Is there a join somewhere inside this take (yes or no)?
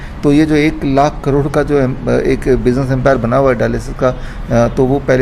no